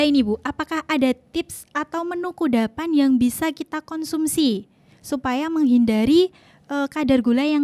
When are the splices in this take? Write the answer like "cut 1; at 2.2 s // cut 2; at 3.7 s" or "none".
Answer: none

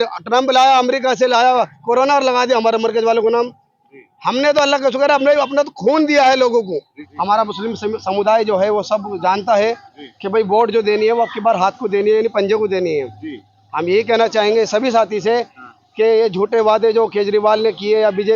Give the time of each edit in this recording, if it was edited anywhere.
cut 1; at 7.0 s

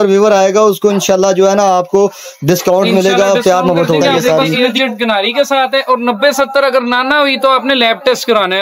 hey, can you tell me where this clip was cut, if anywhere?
cut 1; at 4.1 s

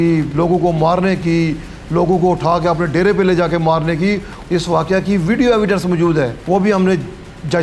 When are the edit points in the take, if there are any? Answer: cut 1; at 4.3 s // cut 2; at 6.4 s

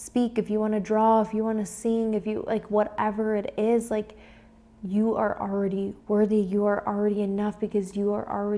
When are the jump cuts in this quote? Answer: none

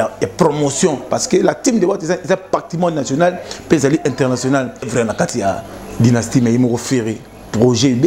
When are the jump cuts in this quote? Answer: cut 1; at 4.9 s

